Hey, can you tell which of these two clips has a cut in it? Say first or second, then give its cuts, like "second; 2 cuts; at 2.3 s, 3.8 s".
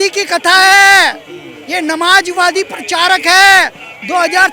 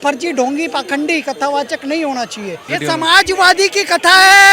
second; 1 cut; at 2.7 s